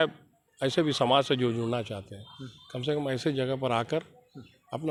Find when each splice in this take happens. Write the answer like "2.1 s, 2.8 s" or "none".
none